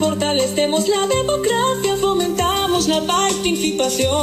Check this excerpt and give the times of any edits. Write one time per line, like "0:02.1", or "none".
none